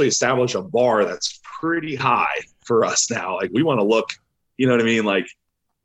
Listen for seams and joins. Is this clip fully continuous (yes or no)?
yes